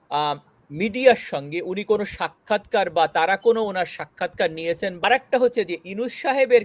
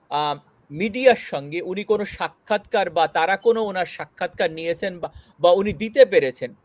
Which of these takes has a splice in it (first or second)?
first